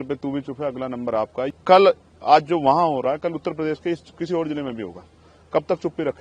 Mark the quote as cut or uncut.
cut